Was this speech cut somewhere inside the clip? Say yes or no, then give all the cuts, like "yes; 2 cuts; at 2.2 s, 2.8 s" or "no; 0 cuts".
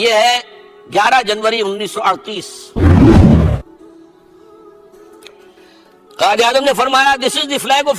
yes; 2 cuts; at 2.6 s, 3.4 s